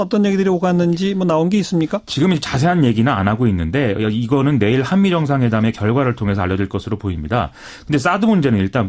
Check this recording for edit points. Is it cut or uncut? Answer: cut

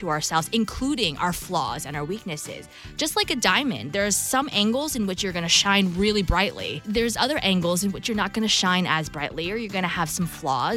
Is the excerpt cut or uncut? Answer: cut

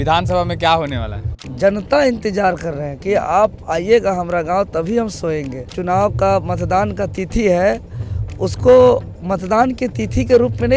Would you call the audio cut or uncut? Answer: cut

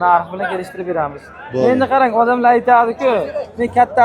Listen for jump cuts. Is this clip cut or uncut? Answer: uncut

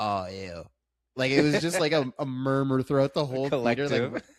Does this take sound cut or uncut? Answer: uncut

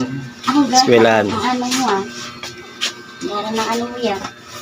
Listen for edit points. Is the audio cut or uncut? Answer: uncut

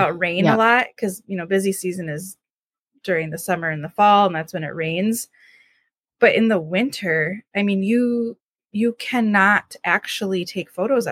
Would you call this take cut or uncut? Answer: uncut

